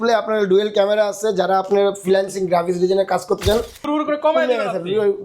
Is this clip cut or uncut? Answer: cut